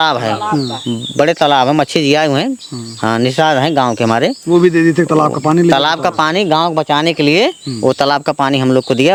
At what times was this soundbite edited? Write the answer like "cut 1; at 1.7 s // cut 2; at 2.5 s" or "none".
none